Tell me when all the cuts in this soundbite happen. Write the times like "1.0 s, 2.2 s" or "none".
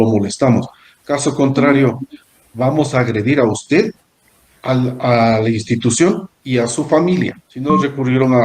7.5 s